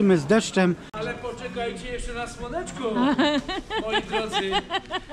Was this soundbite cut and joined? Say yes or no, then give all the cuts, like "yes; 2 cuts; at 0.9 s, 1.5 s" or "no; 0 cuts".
yes; 1 cut; at 0.9 s